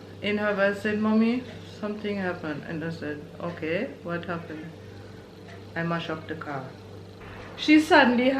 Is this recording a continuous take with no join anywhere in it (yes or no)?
no